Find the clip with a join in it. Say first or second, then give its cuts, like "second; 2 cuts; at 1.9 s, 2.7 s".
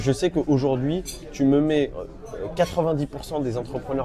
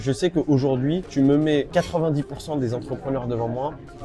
second; 2 cuts; at 1.0 s, 1.7 s